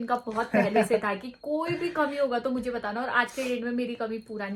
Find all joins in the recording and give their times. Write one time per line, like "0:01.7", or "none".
none